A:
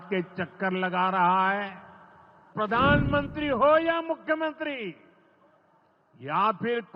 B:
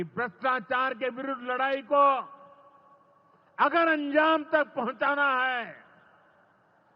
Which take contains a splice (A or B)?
A